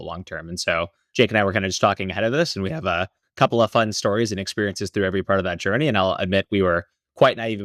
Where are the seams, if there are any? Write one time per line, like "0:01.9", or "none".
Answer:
0:01.0